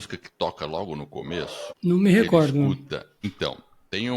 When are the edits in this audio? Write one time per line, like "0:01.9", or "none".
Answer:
0:01.7
0:03.2